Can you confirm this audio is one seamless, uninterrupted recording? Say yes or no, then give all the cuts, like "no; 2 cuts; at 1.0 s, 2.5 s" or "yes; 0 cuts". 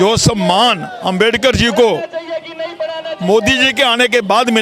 yes; 0 cuts